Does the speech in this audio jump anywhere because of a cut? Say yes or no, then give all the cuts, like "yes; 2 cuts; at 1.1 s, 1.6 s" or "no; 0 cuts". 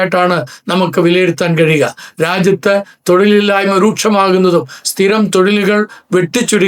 no; 0 cuts